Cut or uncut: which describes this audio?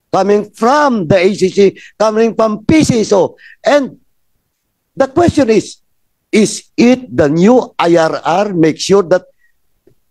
uncut